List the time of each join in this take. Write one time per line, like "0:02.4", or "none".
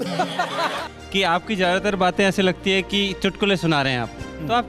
0:00.9